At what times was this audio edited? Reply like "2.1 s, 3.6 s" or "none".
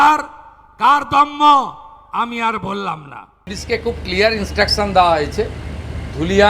3.5 s